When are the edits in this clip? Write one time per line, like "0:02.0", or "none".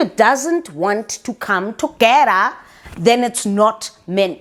none